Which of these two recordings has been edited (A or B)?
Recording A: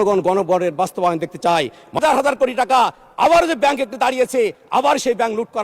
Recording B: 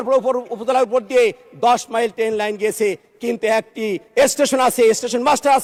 A